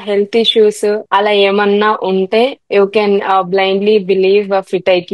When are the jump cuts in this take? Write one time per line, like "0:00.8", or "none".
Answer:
0:01.0
0:02.6

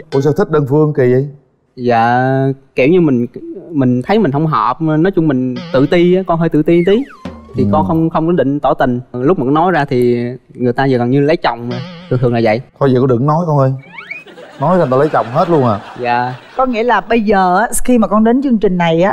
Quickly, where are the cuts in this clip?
none

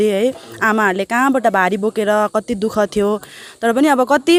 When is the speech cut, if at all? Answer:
none

